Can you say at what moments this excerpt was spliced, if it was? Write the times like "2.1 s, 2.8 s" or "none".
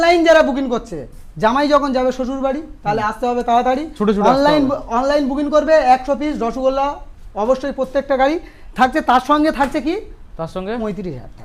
none

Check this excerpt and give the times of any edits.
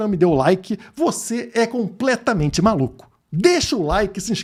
none

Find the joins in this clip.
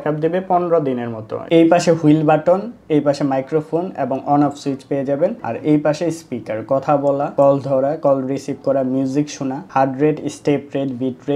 1.4 s

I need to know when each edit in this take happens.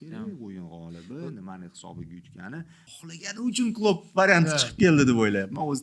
2.8 s

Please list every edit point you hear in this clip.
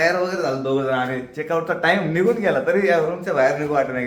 none

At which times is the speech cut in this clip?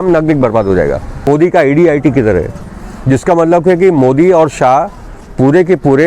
1.3 s

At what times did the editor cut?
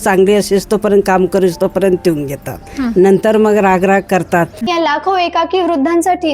4.7 s

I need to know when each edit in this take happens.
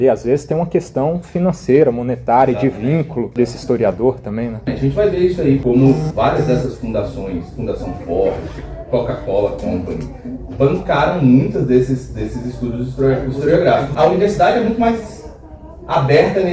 3.3 s, 4.6 s, 5.6 s, 13.9 s

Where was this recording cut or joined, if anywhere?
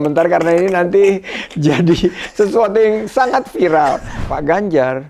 4.2 s

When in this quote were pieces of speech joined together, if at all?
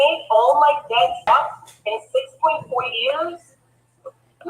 1.3 s

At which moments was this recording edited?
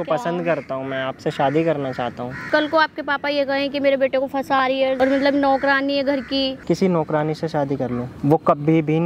2.5 s, 5.0 s, 6.6 s

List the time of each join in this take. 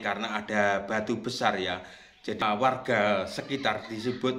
2.4 s

